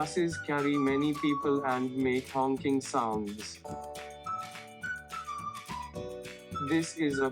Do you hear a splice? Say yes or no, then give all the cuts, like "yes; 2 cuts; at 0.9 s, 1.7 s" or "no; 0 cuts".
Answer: yes; 2 cuts; at 3.4 s, 5.9 s